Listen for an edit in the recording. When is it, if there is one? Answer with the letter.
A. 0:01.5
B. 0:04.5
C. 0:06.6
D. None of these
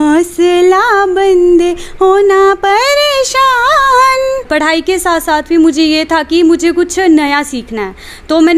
B